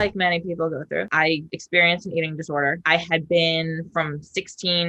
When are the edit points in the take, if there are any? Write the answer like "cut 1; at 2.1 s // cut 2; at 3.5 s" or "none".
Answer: none